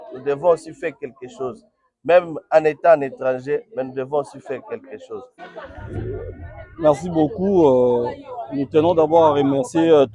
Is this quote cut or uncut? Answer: cut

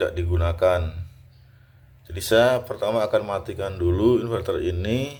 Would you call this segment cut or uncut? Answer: uncut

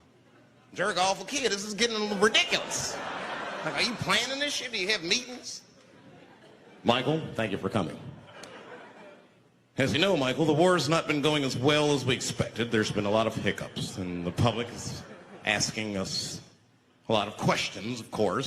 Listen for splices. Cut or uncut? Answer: uncut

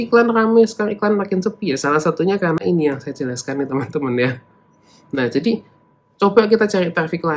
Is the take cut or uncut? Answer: uncut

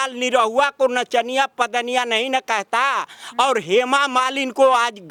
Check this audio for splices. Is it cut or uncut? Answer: uncut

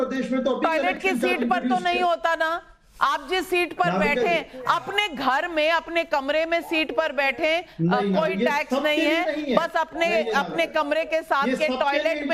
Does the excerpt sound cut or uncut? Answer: uncut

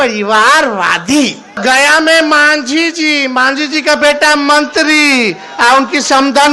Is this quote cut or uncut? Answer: cut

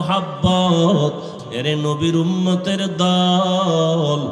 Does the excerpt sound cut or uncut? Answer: cut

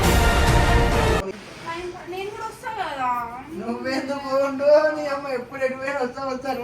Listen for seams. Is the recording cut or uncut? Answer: cut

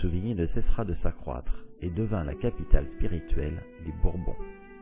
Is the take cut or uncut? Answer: uncut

